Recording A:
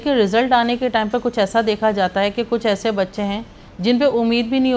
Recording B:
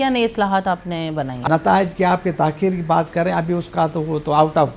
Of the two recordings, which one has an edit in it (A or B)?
B